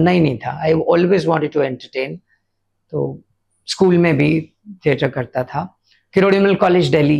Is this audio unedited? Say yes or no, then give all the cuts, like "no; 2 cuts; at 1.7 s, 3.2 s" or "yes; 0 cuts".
yes; 0 cuts